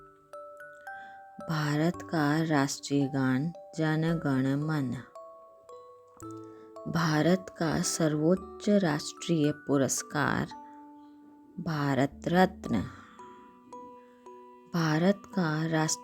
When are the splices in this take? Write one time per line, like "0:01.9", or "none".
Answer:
0:01.0
0:05.0
0:06.5